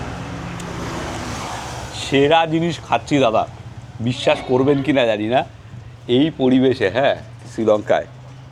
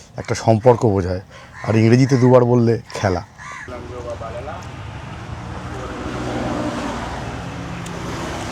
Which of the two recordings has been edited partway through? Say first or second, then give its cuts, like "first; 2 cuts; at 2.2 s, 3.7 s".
second; 1 cut; at 3.7 s